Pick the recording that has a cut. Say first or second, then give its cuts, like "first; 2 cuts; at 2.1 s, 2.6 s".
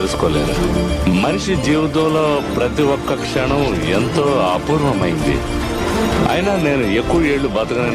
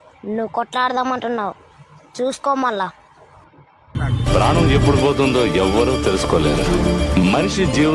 second; 1 cut; at 4.0 s